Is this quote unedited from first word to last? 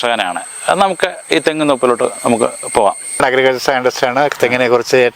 no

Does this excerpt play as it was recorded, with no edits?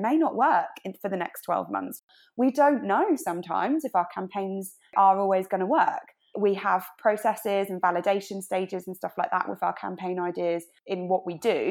no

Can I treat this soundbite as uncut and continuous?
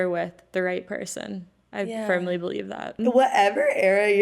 no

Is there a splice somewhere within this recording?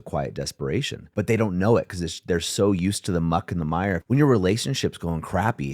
yes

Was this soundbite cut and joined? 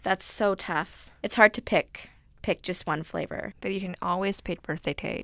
yes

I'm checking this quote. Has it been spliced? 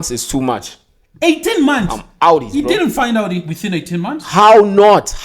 no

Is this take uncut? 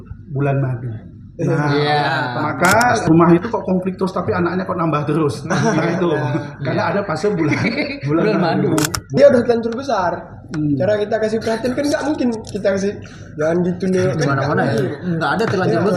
no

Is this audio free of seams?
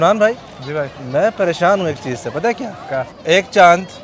no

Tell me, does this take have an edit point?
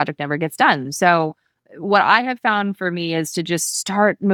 no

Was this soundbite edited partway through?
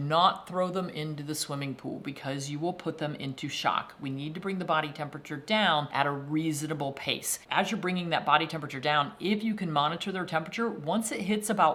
no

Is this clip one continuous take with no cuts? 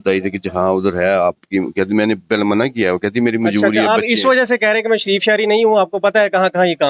yes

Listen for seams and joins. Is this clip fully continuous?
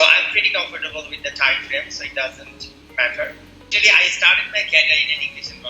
no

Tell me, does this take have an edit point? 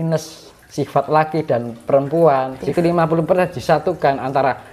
yes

